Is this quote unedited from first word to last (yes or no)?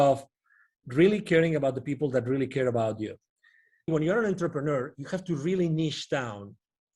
no